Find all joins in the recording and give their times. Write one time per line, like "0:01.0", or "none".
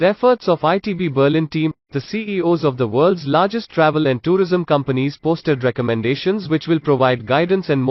none